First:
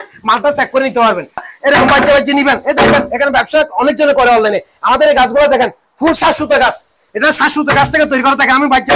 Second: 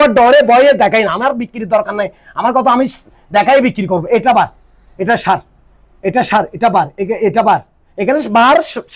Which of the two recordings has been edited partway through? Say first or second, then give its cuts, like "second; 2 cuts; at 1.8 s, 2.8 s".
first; 1 cut; at 1.5 s